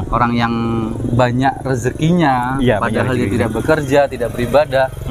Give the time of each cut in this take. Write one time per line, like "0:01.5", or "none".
none